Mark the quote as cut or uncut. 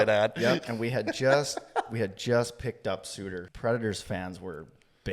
cut